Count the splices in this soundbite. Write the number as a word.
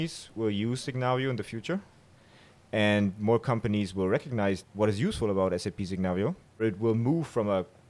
two